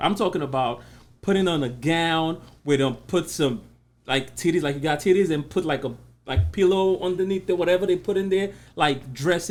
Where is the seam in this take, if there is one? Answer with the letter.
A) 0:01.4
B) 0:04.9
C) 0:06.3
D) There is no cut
D